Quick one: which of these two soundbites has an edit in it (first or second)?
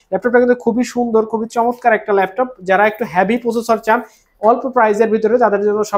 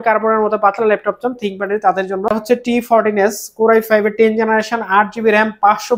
second